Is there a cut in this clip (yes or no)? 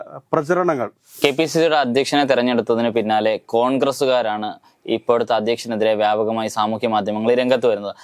yes